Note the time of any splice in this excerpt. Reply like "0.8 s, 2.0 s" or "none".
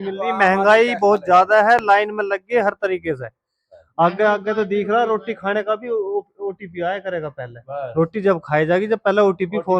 none